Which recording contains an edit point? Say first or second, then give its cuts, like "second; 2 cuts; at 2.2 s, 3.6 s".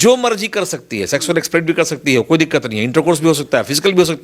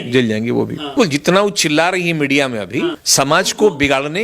second; 2 cuts; at 0.9 s, 3.0 s